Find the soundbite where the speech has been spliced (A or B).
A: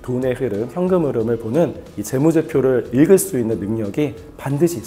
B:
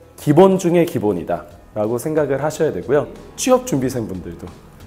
B